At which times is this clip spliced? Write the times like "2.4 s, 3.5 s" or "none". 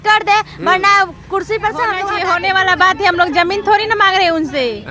2.1 s